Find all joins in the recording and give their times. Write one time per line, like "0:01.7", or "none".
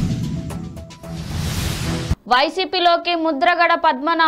0:02.1